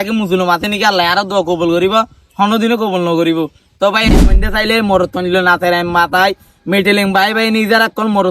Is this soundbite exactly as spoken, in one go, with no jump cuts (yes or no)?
no